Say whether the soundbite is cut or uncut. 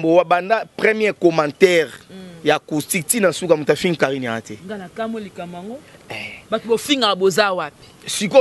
uncut